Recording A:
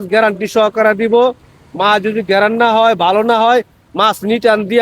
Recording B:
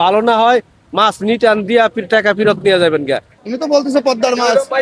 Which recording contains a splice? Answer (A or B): B